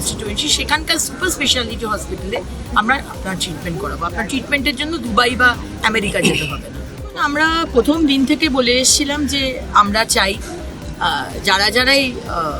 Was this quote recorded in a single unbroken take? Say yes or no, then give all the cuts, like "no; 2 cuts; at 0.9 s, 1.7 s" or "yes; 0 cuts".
no; 1 cut; at 7.1 s